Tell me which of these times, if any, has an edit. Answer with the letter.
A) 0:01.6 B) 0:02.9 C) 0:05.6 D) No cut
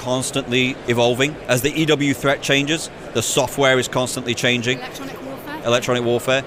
D